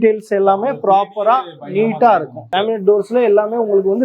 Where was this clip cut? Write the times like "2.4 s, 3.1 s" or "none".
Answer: 2.5 s